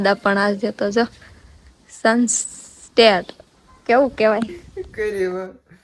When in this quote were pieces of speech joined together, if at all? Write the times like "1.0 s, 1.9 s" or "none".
4.6 s